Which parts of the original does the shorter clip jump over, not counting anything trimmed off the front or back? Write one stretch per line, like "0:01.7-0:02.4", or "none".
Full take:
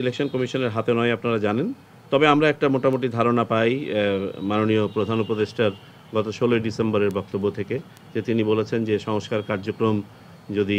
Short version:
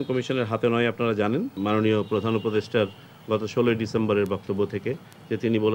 0:01.8-0:04.4